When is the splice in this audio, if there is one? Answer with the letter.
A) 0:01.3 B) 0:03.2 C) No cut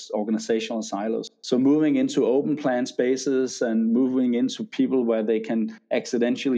A